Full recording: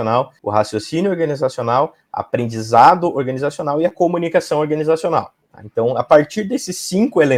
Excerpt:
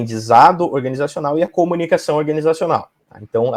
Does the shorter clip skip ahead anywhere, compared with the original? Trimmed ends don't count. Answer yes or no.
no